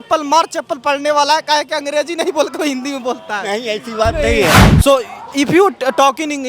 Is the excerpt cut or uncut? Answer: cut